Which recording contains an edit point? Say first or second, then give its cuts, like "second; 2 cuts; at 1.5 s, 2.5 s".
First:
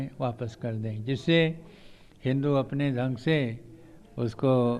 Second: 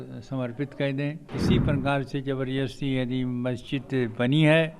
second; 1 cut; at 1.3 s